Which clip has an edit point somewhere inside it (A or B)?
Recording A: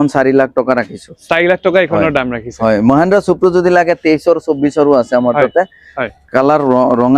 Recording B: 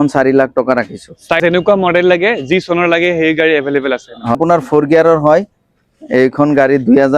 B